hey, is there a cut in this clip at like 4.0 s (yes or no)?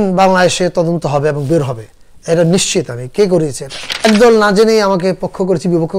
yes